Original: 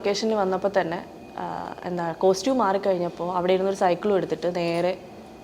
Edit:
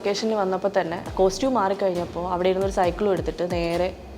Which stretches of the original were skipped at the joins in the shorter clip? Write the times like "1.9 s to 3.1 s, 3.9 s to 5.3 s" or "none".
1.1 s to 2.1 s